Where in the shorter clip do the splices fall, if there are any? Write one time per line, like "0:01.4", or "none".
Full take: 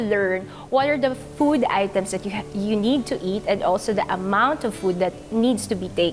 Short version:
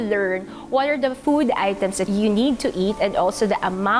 0:01.2
0:02.0

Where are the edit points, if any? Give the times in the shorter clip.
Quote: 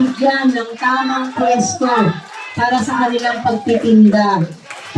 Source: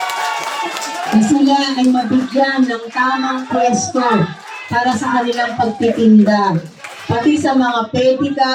none

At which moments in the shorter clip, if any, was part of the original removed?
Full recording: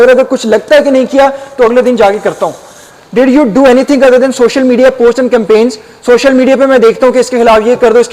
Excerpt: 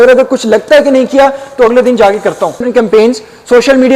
0:02.7

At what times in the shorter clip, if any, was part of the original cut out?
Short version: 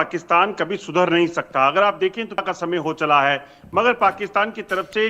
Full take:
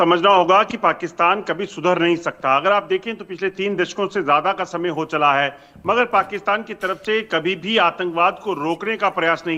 0:02.4

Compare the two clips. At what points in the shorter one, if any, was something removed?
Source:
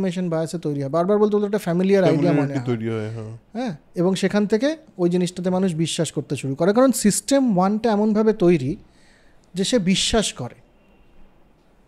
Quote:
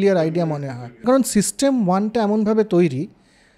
0:01.0

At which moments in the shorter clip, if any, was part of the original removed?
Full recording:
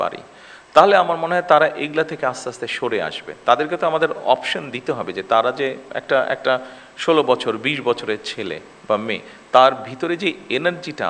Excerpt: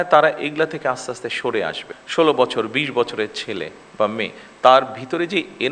0:01.9

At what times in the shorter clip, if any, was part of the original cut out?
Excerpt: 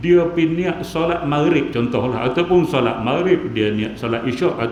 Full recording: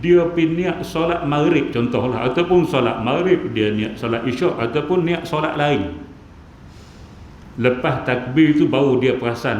none

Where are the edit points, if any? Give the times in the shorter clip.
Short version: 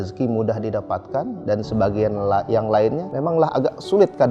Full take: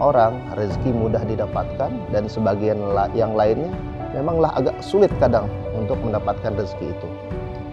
0:03.1

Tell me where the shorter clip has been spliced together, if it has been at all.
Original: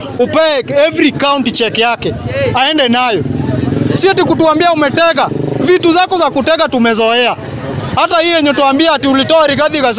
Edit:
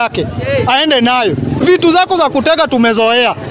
0:01.6

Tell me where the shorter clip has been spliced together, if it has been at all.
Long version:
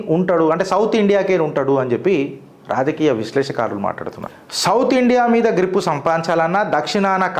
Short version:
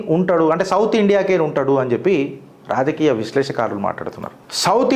none

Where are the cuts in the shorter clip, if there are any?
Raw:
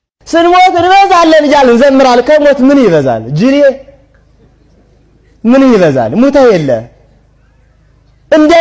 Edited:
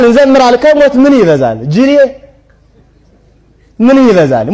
none

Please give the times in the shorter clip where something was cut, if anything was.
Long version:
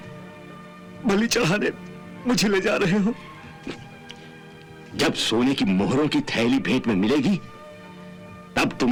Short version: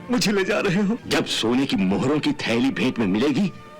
0:01.0

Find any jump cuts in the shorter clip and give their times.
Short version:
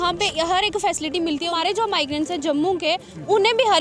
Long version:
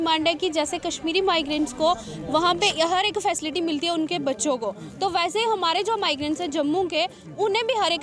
0:01.5

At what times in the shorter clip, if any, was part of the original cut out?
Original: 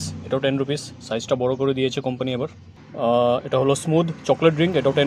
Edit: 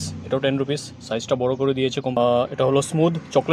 0:02.2

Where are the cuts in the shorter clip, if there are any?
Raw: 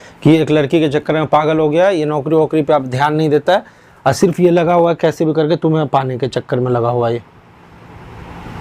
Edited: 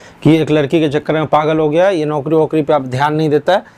none

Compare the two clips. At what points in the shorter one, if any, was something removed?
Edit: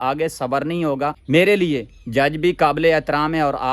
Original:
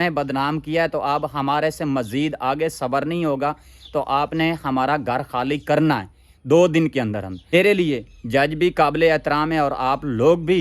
0:01.2

